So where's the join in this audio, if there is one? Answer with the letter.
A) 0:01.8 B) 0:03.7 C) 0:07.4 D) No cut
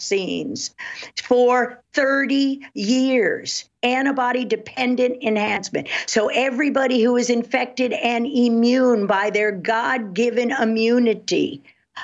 B